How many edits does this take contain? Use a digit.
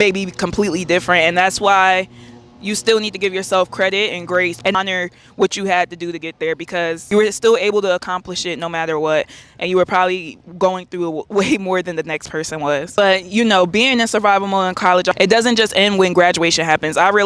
0